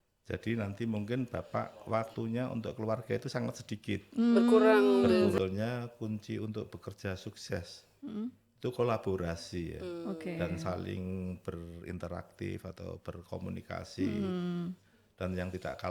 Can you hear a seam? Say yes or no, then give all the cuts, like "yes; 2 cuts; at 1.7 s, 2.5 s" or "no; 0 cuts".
yes; 1 cut; at 5.4 s